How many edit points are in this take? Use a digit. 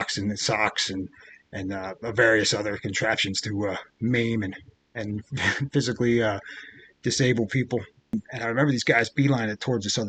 1